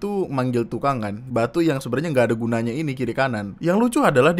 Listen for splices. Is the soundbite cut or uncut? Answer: cut